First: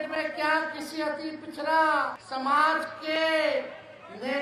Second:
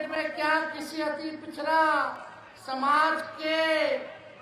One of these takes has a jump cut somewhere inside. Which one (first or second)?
first